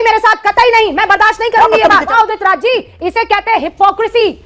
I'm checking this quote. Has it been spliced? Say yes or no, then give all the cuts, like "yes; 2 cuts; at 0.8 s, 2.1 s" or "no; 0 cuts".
yes; 1 cut; at 2.1 s